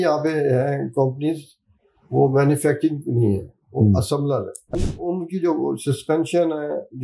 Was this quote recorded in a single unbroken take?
no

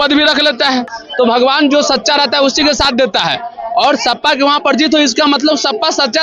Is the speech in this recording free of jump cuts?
no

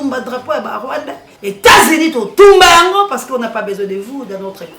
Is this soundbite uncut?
no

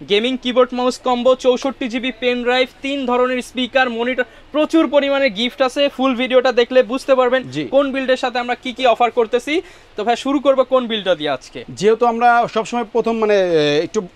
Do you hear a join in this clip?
no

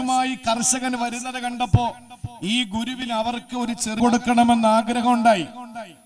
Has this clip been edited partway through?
yes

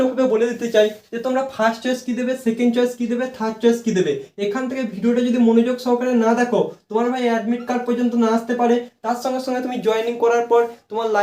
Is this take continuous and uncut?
yes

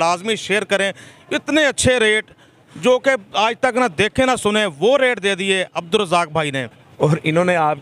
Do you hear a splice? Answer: yes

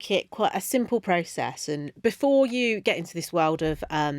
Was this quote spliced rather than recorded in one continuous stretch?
no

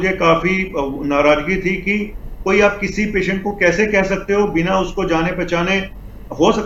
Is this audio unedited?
yes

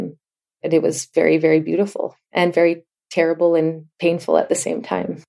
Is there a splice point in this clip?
no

